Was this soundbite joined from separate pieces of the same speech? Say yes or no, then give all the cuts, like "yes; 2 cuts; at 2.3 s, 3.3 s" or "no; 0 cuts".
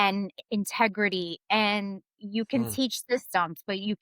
no; 0 cuts